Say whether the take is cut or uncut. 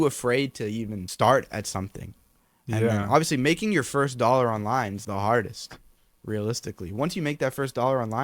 cut